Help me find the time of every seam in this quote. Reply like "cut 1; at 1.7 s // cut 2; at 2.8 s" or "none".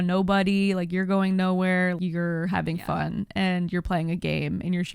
cut 1; at 2.0 s